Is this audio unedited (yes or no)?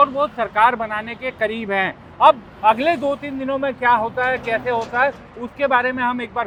yes